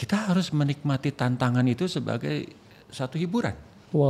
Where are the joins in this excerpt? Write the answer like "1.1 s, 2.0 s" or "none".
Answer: none

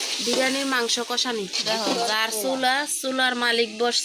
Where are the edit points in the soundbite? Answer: 1.6 s

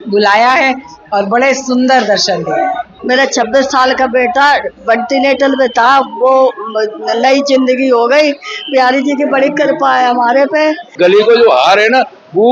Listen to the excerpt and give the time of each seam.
2.9 s, 10.9 s

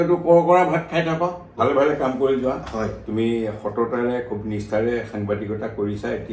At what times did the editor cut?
1.6 s

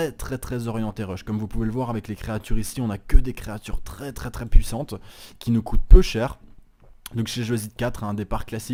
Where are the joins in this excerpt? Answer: none

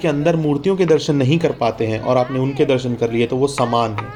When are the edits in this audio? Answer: none

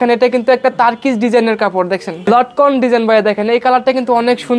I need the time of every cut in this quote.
2.3 s

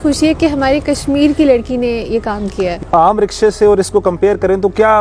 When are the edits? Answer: 2.8 s

